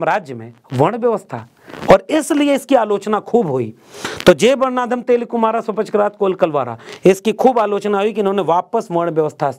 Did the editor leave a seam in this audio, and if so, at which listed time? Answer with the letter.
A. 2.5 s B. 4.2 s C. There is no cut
C